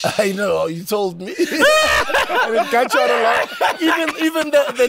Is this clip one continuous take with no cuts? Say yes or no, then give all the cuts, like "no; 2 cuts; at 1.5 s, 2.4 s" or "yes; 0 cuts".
yes; 0 cuts